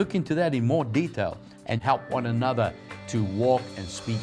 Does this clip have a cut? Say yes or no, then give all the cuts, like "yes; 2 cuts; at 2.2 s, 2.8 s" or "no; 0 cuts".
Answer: yes; 1 cut; at 1.7 s